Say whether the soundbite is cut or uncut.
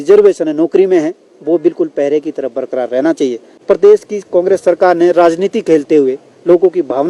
cut